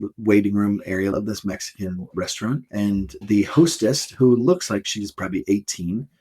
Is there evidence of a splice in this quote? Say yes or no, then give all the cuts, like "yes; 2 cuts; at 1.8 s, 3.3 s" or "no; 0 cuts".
yes; 2 cuts; at 1.1 s, 3.2 s